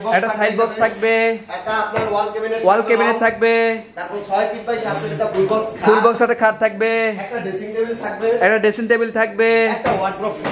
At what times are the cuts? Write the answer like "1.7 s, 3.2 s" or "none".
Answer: none